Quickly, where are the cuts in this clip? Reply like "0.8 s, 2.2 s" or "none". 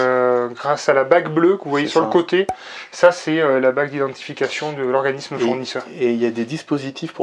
none